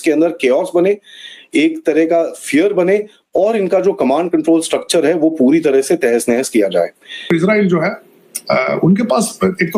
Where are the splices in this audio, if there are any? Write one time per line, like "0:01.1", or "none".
0:07.3